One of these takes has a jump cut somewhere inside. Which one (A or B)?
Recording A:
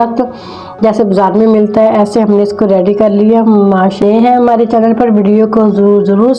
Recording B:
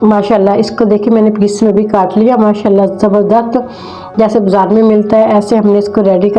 A